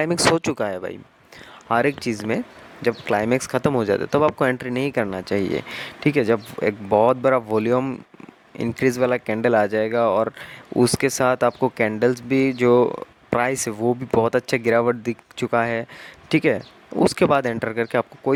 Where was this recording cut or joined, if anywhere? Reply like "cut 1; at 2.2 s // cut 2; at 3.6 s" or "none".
none